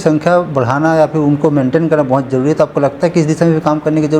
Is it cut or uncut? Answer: uncut